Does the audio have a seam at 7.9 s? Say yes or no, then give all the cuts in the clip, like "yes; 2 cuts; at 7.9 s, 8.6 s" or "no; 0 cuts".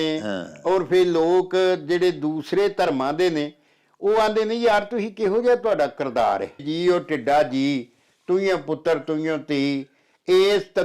no; 1 cut; at 6.6 s